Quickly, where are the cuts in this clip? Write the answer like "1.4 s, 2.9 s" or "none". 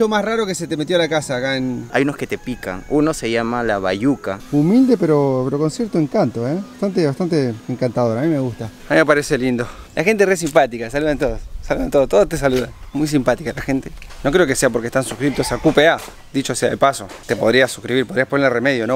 1.9 s, 4.3 s, 9.8 s